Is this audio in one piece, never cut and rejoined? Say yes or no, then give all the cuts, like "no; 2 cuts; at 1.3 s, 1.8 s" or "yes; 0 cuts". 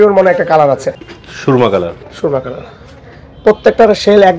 no; 1 cut; at 1.1 s